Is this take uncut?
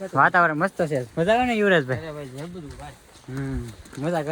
yes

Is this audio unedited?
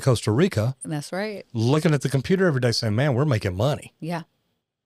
yes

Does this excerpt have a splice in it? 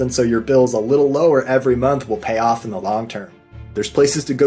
yes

